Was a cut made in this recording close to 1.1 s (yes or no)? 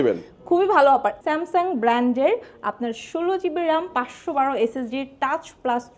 yes